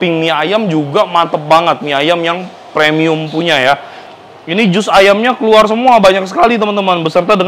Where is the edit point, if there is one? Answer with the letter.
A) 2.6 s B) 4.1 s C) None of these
B